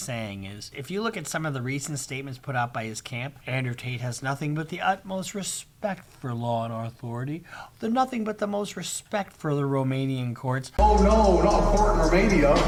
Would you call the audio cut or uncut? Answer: uncut